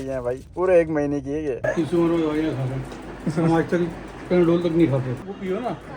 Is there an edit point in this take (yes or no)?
yes